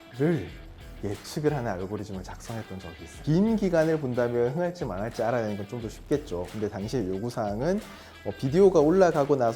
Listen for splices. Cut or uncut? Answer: cut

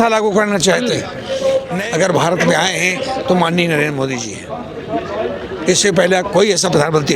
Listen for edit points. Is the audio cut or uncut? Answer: cut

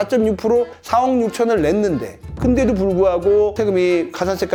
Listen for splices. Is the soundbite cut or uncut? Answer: uncut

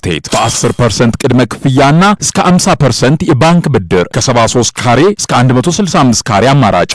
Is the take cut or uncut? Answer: uncut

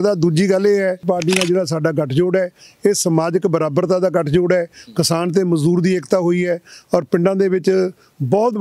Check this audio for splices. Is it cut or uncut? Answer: cut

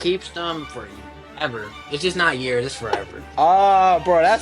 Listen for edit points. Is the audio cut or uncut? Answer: cut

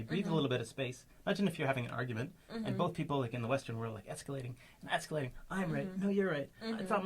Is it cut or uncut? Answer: uncut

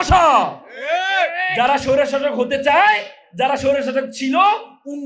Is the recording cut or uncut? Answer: uncut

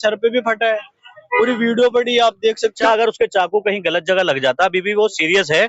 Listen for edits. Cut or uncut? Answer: cut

